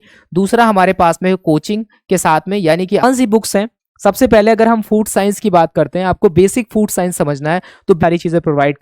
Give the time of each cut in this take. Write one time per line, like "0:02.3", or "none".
0:03.0
0:08.0